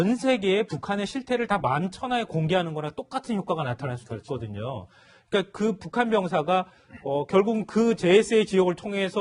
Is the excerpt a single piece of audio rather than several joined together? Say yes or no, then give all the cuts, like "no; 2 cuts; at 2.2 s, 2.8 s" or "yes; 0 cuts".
yes; 0 cuts